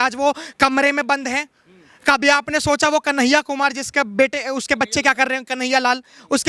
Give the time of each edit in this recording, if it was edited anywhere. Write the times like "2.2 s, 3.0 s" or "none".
none